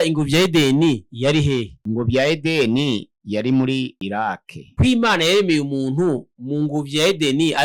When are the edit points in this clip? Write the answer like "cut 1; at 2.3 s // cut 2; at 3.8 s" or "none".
cut 1; at 1.1 s // cut 2; at 4.6 s